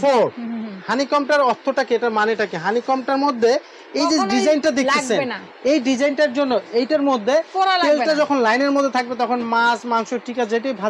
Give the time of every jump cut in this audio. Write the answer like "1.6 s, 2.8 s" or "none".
none